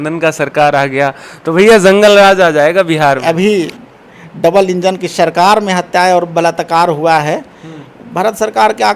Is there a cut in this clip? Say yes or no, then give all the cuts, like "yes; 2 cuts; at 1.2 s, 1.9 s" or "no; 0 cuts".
yes; 1 cut; at 3.2 s